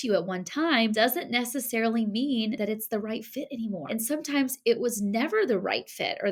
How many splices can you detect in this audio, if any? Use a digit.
0